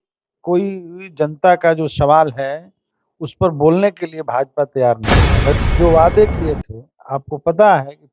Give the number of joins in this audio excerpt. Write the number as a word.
one